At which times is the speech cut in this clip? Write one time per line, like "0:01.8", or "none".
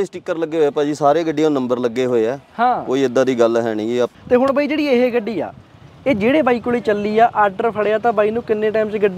0:04.1